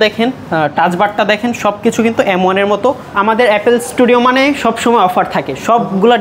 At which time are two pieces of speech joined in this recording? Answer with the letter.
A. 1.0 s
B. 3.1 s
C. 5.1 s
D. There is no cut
B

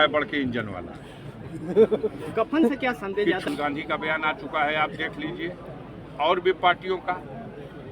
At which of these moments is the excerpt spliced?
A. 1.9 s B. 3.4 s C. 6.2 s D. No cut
B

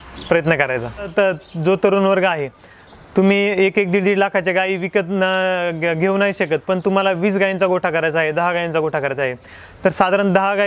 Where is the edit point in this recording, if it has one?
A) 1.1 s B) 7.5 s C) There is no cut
A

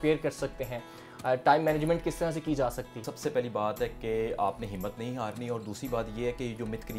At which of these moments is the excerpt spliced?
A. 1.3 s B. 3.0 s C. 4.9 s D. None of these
D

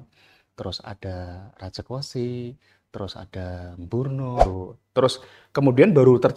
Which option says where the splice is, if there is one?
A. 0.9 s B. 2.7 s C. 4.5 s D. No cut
C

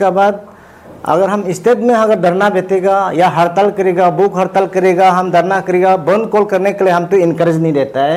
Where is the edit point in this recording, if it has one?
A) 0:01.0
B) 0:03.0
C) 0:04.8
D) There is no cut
D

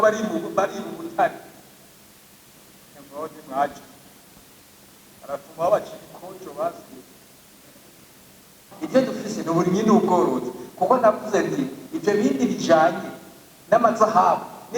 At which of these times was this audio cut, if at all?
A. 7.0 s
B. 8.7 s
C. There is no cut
B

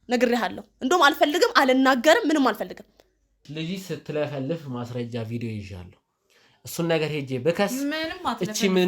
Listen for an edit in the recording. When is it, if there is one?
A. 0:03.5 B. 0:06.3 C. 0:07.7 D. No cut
A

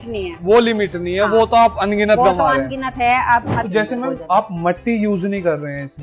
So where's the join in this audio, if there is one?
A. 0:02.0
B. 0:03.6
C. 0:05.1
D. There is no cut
B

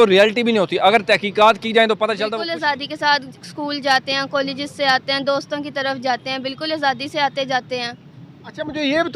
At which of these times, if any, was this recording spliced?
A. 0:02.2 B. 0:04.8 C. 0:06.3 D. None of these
A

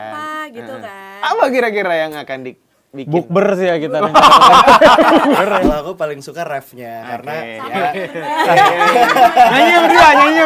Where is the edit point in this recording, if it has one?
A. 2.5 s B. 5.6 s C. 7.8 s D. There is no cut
B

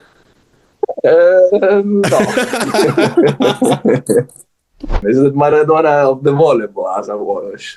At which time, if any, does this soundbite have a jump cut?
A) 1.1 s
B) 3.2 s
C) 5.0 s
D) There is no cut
C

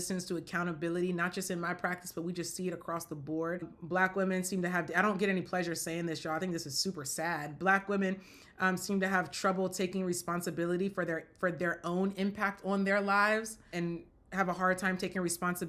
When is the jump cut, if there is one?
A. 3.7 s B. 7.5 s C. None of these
A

